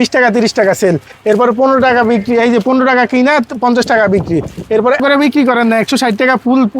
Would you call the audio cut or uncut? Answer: cut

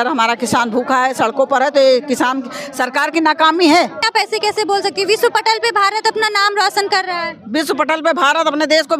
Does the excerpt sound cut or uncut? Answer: cut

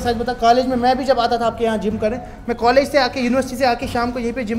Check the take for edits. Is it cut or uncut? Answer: uncut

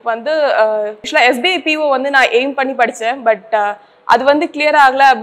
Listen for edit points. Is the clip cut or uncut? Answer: cut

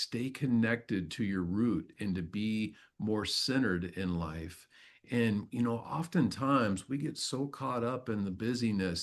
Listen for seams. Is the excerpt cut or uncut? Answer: uncut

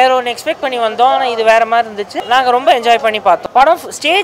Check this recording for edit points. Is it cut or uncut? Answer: cut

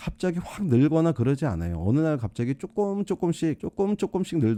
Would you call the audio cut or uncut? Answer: uncut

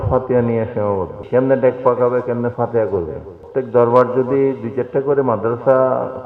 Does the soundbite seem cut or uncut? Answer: cut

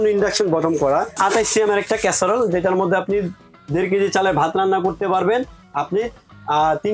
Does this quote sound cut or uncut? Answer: cut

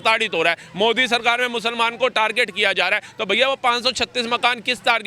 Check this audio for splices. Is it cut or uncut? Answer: uncut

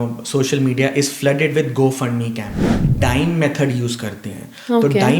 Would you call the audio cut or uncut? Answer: cut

